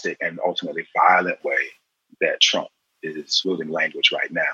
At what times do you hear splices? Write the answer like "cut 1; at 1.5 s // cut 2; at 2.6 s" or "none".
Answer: cut 1; at 3.3 s